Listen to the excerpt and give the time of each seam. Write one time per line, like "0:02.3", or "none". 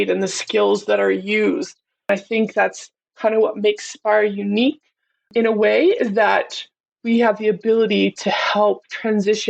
0:02.1
0:05.3